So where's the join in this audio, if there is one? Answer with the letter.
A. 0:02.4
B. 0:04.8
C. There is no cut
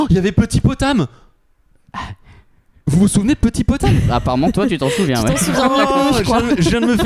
C